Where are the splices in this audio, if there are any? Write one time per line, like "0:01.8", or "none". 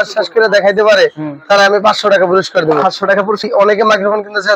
0:03.5